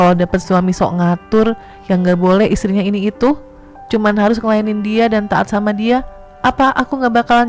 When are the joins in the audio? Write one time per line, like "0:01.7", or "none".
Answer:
none